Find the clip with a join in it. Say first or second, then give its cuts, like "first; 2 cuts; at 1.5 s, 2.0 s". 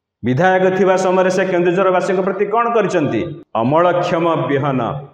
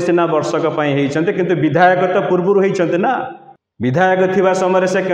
first; 1 cut; at 3.4 s